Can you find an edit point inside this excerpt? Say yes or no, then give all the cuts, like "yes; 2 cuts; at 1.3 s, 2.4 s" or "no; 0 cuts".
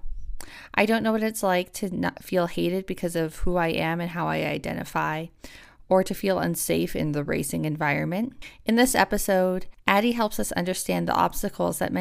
yes; 1 cut; at 9.7 s